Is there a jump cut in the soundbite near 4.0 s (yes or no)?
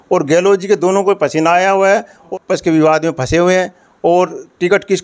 no